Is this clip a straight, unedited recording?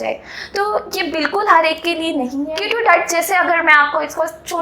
no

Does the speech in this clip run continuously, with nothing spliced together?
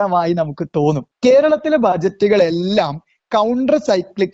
no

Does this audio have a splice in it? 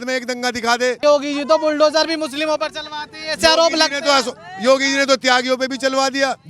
yes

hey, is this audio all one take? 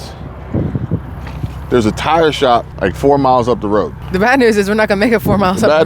no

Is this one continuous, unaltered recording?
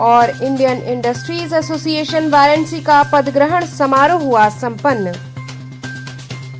yes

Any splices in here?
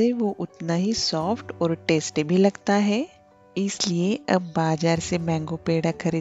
no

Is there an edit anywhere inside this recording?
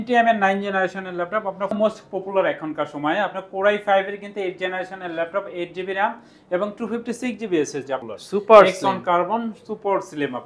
yes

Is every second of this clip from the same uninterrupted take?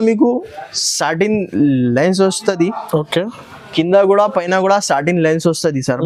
yes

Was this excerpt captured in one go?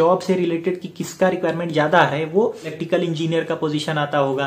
no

